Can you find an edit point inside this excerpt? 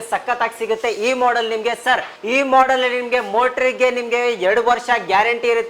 yes; 1 cut; at 2.1 s

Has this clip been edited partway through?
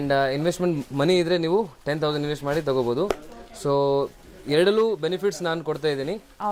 no; 0 cuts

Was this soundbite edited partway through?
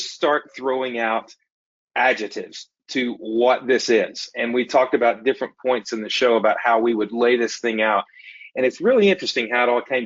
no; 0 cuts

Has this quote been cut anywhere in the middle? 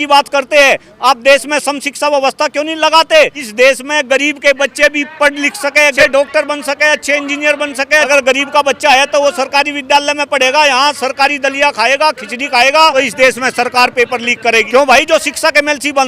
yes; 5 cuts; at 3.4 s, 6.0 s, 8.1 s, 12.9 s, 14.7 s

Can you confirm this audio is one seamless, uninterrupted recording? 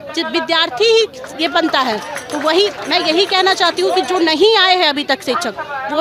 yes; 0 cuts

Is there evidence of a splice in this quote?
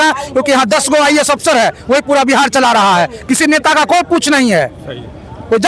no; 0 cuts

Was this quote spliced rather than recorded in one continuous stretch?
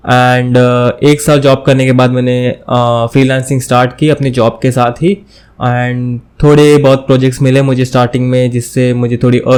no; 0 cuts

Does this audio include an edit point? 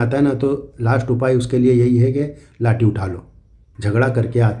yes; 1 cut; at 3.7 s

